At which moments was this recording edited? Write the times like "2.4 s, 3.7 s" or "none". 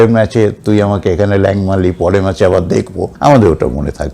3.0 s